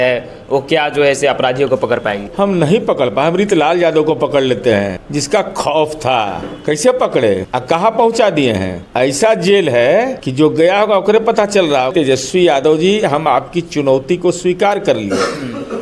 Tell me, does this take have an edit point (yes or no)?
yes